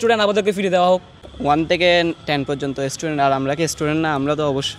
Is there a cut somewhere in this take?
no; 0 cuts

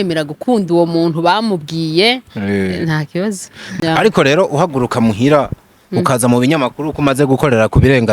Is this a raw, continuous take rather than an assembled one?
no; 1 cut; at 3.7 s

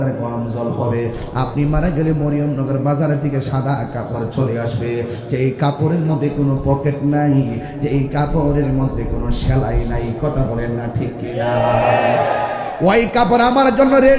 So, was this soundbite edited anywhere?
no; 0 cuts

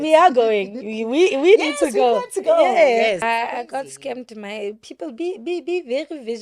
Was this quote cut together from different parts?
yes; 1 cut; at 3.2 s

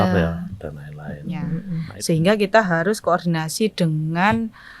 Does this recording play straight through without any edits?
no; 1 cut; at 1.5 s

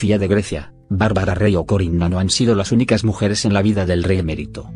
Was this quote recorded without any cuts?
yes; 0 cuts

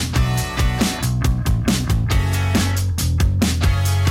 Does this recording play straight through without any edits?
no; 1 cut; at 1.1 s

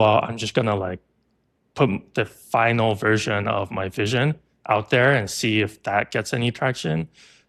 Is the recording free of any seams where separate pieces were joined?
yes; 0 cuts

